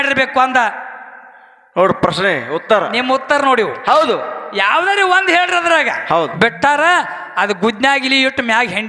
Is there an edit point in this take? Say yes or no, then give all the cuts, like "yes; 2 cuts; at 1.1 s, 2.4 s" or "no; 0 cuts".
yes; 1 cut; at 6.3 s